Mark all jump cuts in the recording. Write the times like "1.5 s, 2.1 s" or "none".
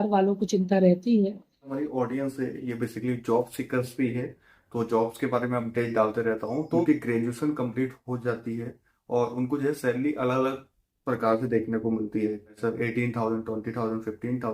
1.7 s, 6.8 s, 12.6 s